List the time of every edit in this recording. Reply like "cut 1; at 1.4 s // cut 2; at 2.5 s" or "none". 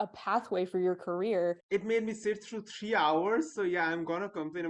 cut 1; at 1.6 s